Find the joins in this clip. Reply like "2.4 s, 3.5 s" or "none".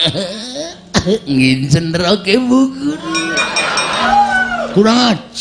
4.0 s